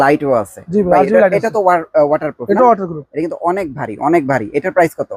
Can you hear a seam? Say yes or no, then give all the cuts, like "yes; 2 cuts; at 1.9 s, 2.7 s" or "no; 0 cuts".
no; 0 cuts